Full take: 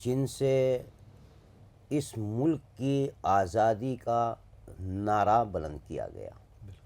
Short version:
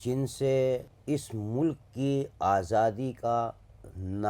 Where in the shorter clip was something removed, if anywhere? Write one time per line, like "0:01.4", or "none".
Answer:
0:00.9